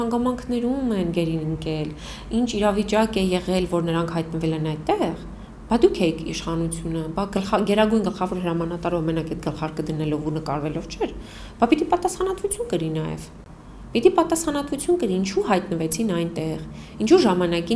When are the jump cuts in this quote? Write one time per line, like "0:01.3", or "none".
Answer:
none